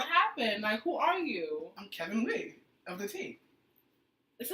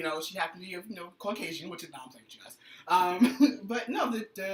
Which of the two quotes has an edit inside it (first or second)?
first